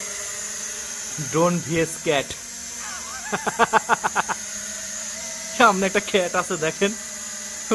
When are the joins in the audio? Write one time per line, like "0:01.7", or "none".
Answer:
none